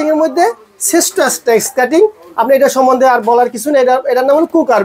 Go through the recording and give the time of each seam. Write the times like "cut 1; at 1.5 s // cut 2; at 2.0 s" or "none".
none